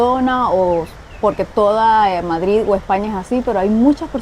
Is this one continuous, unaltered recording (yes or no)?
yes